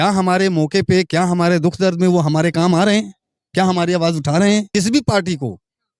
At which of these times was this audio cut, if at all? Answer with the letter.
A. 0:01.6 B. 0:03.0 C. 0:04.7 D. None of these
C